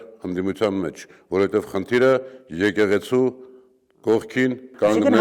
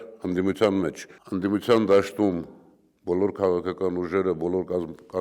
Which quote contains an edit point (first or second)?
second